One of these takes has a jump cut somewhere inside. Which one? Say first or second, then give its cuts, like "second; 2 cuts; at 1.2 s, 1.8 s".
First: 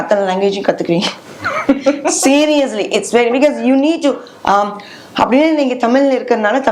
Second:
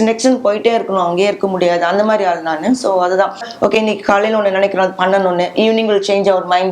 second; 1 cut; at 3.5 s